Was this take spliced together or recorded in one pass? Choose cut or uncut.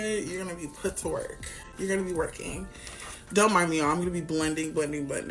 uncut